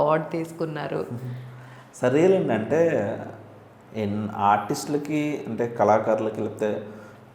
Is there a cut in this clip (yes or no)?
no